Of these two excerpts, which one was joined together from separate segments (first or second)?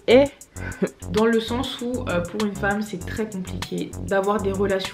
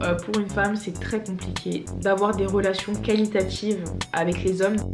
first